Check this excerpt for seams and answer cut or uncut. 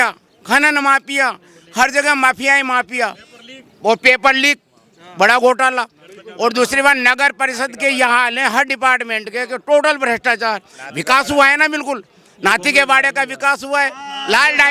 uncut